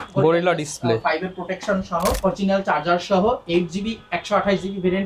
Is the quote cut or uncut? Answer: cut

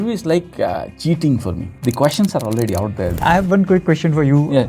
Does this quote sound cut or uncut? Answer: cut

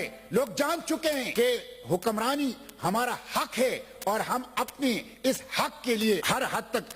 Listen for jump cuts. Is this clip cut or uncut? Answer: cut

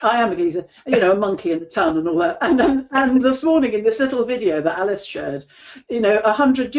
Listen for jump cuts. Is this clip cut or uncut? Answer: uncut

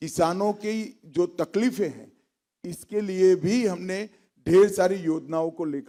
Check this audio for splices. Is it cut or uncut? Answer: uncut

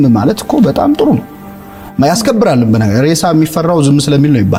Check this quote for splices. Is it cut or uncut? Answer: uncut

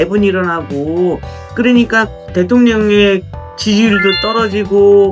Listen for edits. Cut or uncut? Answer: uncut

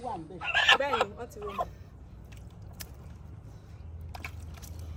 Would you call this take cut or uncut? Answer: uncut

